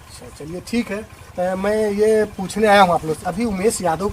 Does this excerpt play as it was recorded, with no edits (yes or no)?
no